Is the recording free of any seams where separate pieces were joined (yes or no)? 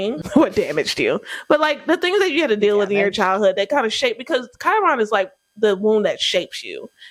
yes